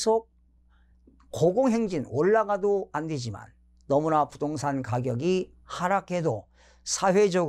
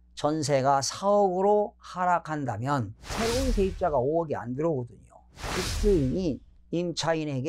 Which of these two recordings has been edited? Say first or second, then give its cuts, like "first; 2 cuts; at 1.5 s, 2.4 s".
second; 2 cuts; at 3.0 s, 5.5 s